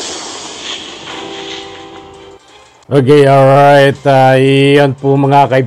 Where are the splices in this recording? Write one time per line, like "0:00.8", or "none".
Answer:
none